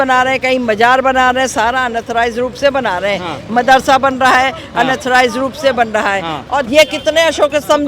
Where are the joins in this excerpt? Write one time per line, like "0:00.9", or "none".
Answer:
0:06.7

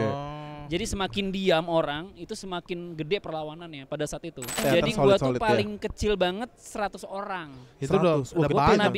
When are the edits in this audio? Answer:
0:04.6

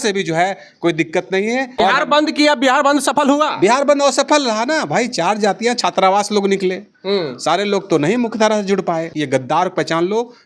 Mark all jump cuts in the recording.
0:01.7
0:09.1

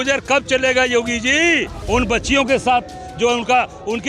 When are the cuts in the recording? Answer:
0:01.7

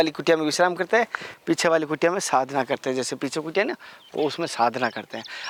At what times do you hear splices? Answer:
none

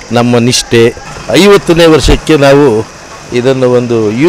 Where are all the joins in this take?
0:01.1

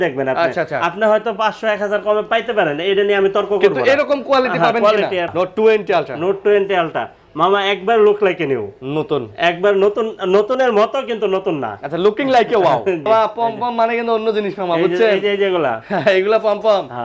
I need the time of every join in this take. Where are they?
0:05.3
0:13.1

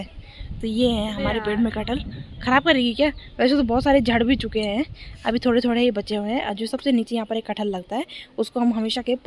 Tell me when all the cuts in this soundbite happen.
none

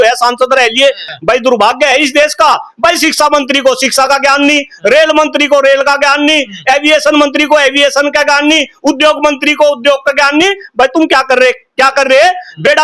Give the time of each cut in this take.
0:01.1

